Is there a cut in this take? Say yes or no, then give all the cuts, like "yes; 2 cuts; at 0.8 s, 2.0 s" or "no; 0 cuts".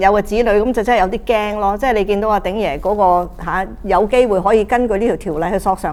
no; 0 cuts